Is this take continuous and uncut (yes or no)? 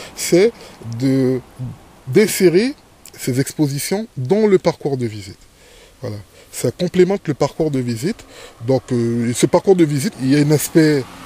no